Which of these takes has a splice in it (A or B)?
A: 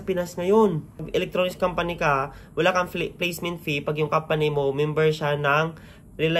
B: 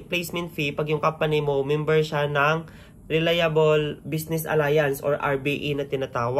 A